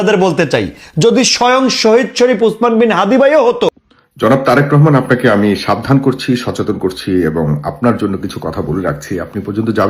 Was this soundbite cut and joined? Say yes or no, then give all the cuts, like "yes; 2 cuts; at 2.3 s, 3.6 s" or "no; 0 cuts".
yes; 1 cut; at 3.9 s